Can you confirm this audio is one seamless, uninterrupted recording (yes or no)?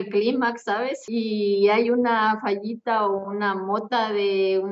no